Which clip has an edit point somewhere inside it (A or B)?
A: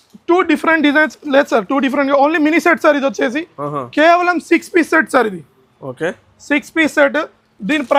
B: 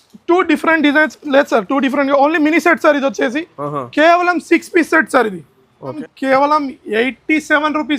B